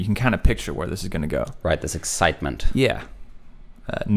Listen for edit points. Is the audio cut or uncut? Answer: uncut